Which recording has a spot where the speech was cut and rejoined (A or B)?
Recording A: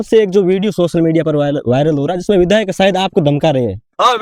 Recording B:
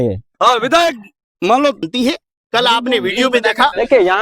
B